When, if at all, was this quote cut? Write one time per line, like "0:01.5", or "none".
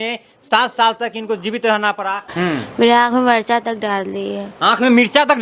none